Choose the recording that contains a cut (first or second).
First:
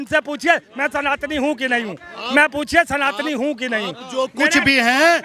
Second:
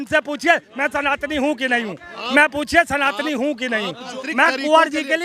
second